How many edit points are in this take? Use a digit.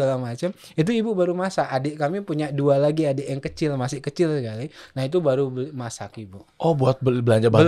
0